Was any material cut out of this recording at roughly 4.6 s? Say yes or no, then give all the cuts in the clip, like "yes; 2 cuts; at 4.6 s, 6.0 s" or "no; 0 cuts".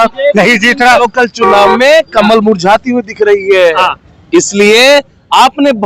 no; 1 cut; at 1.1 s